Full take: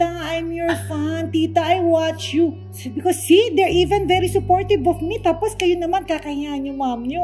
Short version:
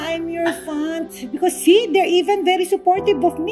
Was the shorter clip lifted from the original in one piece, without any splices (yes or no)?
no